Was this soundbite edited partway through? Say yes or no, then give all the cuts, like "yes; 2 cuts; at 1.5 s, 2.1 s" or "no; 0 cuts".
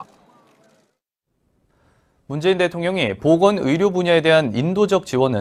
yes; 1 cut; at 2.9 s